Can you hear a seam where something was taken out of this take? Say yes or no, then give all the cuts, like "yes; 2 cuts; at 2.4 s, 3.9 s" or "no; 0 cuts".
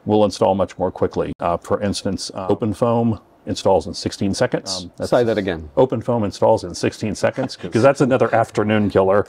yes; 3 cuts; at 2.3 s, 4.9 s, 7.5 s